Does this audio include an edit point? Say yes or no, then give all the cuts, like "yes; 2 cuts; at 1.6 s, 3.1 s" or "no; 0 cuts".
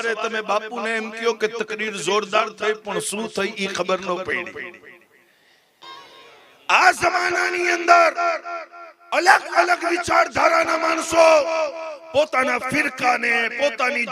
yes; 1 cut; at 5.8 s